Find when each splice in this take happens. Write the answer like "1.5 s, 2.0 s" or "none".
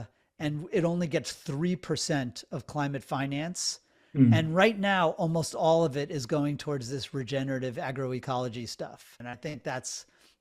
9.2 s